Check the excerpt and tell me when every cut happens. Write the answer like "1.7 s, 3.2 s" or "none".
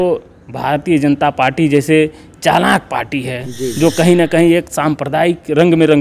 none